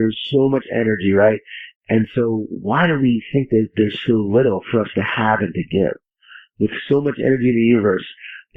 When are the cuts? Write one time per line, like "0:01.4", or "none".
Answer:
none